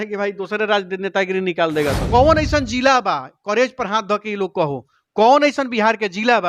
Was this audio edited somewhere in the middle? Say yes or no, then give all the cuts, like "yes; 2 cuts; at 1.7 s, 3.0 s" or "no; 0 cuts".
yes; 1 cut; at 2.0 s